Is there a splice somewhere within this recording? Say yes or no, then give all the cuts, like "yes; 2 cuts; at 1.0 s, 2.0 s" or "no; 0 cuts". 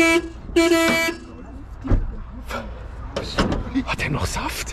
no; 0 cuts